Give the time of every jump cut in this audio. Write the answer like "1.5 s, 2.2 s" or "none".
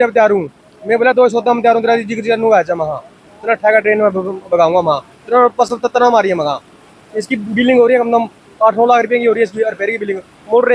none